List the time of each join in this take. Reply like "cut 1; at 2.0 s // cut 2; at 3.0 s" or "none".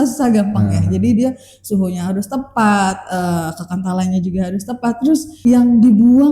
cut 1; at 5.3 s